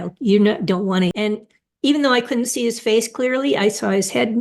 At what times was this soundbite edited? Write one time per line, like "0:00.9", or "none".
0:01.1